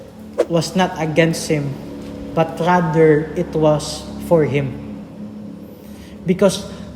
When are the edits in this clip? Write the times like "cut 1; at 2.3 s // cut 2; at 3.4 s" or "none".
none